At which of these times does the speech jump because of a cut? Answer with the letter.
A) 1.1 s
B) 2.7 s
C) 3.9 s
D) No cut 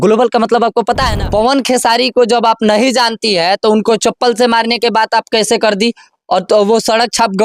A